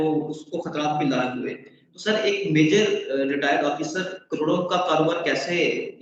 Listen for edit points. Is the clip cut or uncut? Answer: uncut